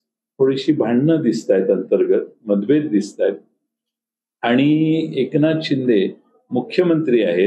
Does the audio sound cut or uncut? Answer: uncut